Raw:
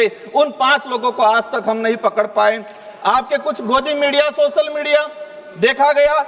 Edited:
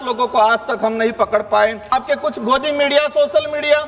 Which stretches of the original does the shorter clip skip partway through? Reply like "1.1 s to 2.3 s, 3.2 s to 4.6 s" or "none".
2.8 s to 3.1 s